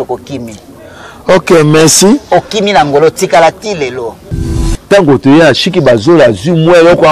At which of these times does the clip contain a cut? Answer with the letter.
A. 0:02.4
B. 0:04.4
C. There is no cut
B